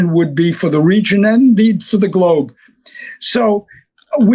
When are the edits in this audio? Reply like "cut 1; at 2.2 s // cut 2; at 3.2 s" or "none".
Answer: none

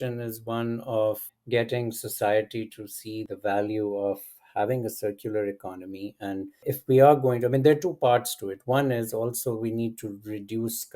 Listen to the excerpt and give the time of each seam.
cut 1; at 1.2 s // cut 2; at 3.3 s // cut 3; at 6.6 s

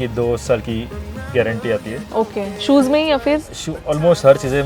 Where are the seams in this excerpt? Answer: none

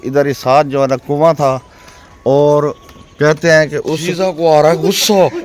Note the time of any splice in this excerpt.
cut 1; at 3.8 s

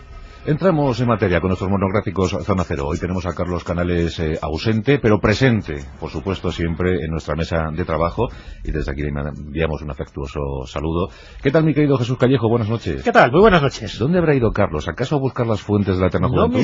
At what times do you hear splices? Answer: none

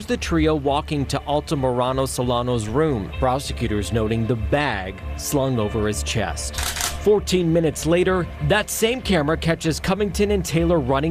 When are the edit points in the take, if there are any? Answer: none

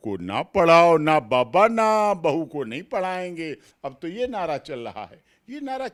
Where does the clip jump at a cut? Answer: none

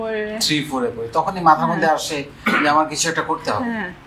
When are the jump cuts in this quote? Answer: none

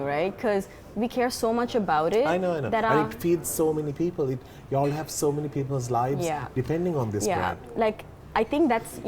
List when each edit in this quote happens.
none

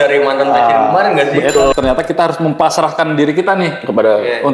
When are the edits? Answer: cut 1; at 1.7 s

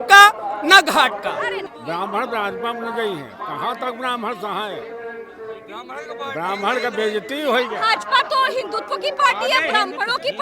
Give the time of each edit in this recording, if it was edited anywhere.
cut 1; at 1.7 s

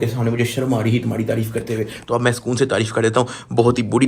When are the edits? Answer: none

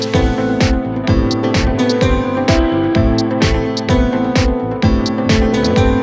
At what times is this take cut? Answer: none

